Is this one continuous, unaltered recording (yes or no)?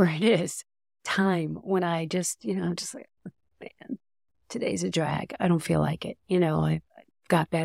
yes